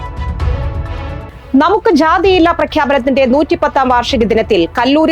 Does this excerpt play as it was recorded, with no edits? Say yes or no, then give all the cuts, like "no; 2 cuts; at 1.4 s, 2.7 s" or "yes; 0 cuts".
no; 1 cut; at 1.2 s